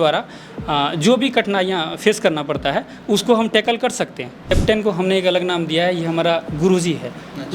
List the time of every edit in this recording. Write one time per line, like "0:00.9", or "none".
0:04.5

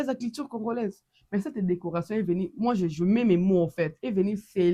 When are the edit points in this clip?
none

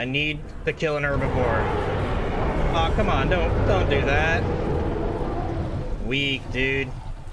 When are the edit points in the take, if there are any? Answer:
none

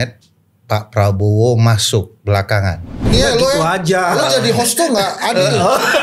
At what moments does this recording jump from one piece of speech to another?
0:03.1

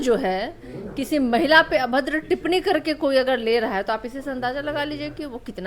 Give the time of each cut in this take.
none

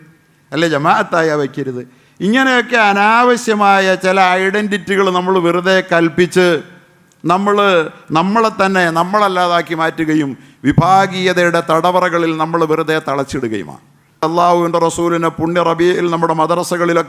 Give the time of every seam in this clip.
0:14.2

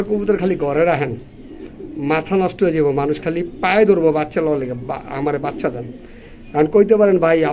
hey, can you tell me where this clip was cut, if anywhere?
none

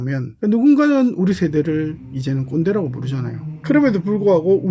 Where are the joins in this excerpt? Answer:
0:03.4

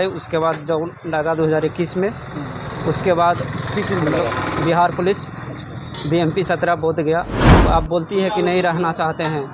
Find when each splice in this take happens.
0:07.5

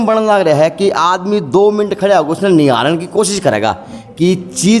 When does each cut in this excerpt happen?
none

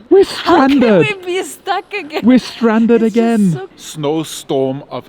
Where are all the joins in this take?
0:03.8

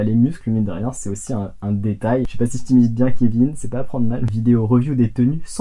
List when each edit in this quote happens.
0:02.3
0:04.3

